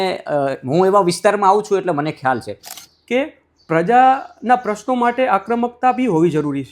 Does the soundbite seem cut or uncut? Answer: cut